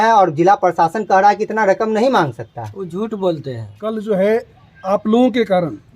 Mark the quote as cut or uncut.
cut